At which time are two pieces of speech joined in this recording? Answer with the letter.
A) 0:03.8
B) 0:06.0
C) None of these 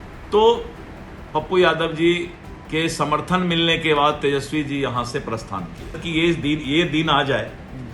B